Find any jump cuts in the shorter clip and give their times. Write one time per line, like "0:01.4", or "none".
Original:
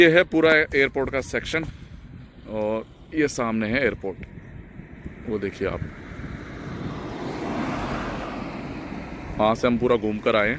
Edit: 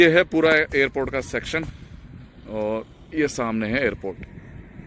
none